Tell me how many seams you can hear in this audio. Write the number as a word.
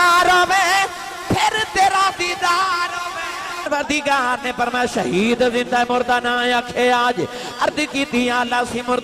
one